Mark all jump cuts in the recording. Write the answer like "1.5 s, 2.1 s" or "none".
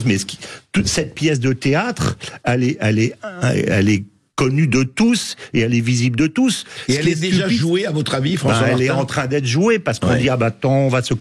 none